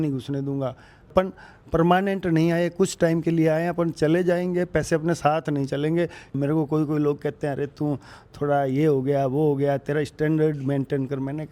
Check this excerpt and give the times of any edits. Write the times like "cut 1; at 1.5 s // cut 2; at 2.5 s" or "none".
cut 1; at 1.1 s // cut 2; at 6.4 s